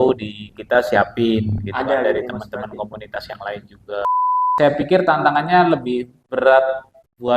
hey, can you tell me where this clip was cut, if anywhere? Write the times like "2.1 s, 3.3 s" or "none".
4.4 s